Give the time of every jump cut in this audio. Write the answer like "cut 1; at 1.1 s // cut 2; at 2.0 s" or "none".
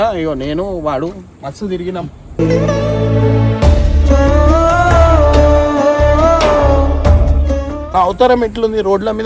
cut 1; at 7.8 s